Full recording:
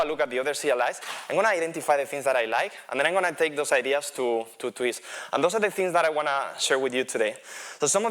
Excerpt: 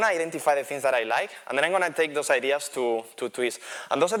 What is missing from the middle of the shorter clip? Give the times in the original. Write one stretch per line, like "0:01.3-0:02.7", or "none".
none